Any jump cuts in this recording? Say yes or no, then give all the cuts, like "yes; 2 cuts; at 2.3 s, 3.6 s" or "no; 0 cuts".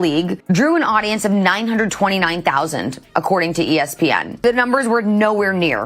no; 0 cuts